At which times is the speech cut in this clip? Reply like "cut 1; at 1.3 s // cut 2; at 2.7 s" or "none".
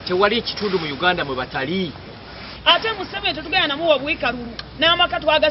cut 1; at 2.7 s